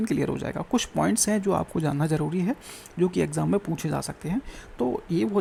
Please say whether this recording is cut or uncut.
uncut